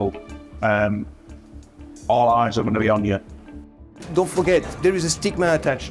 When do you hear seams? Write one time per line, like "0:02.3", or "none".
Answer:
0:03.7
0:04.8